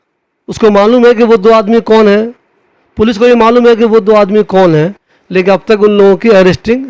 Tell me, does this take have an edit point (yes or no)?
no